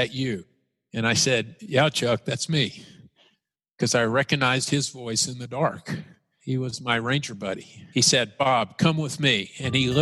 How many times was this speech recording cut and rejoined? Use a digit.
2